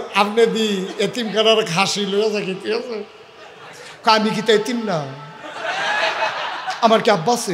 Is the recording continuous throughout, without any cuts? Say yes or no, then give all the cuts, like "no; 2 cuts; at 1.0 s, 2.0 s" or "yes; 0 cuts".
yes; 0 cuts